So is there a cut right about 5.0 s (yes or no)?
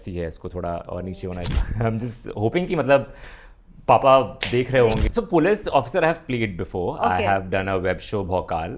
yes